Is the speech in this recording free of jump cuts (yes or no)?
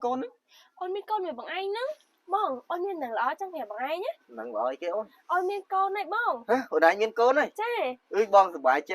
no